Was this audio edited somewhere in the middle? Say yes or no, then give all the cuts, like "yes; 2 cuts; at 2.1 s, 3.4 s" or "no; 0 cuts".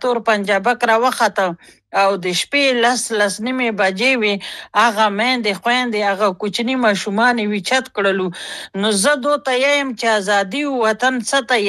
no; 0 cuts